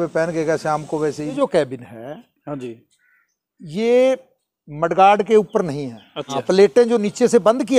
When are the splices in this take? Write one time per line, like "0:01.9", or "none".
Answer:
0:01.3
0:06.2